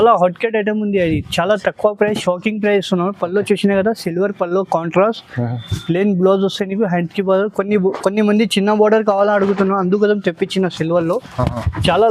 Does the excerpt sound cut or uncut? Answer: uncut